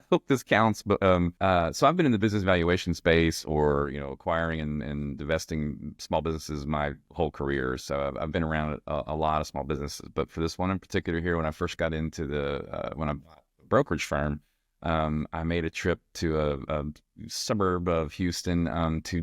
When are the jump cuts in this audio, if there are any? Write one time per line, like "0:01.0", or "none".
0:01.3